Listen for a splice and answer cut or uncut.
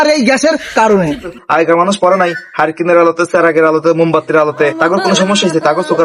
cut